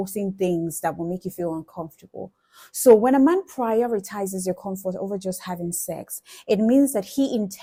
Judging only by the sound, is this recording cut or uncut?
uncut